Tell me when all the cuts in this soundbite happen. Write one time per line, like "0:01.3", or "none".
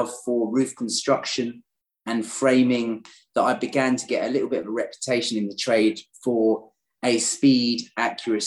none